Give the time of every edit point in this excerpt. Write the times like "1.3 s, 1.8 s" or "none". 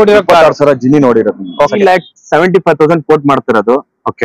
1.7 s